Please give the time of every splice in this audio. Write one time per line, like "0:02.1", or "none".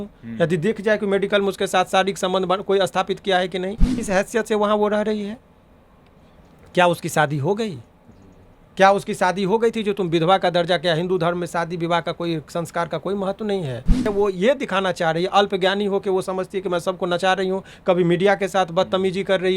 0:03.9
0:14.0